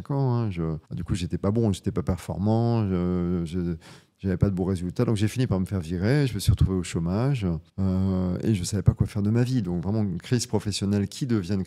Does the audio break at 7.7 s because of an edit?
yes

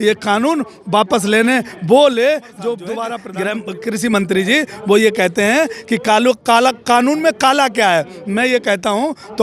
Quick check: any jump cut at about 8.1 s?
no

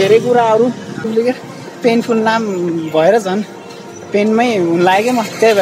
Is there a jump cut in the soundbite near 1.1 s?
yes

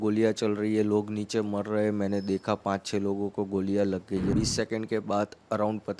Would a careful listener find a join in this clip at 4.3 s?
yes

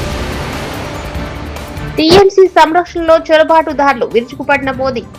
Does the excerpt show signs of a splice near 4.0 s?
no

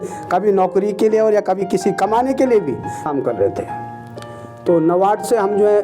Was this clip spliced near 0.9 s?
no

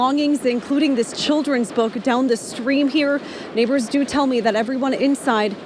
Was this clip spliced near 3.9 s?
no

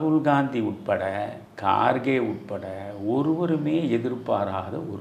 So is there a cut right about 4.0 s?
no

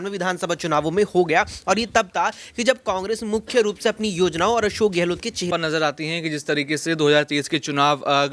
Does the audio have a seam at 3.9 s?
no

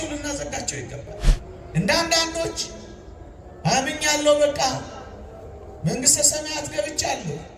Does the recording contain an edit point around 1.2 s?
yes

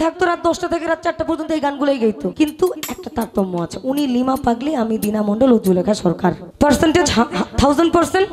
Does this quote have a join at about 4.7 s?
no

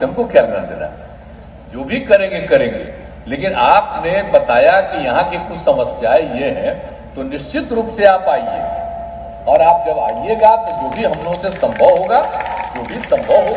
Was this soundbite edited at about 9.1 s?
no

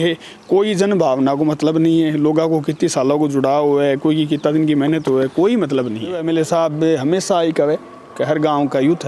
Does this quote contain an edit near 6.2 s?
yes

